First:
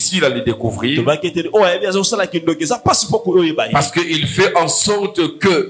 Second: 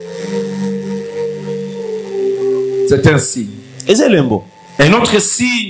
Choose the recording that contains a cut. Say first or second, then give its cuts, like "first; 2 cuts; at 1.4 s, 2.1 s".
second; 1 cut; at 4.6 s